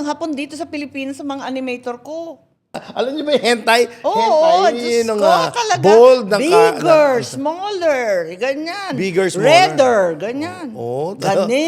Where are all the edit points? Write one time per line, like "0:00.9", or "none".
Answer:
0:02.8